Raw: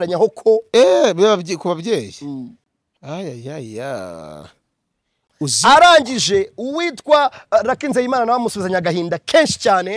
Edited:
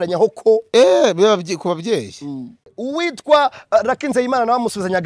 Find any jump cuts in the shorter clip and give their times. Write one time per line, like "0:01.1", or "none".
0:02.8